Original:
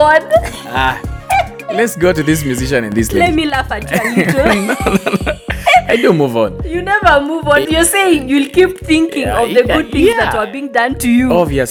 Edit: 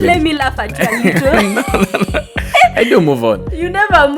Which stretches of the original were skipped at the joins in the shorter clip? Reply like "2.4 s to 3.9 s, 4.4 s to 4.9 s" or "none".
none